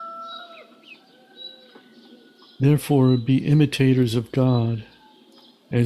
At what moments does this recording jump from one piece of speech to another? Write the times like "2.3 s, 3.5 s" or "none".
2.5 s